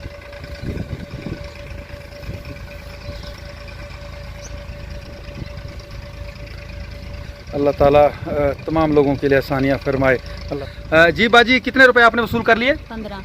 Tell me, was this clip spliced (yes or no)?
yes